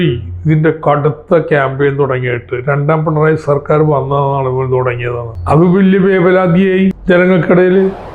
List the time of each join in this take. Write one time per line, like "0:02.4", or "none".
0:05.3
0:07.0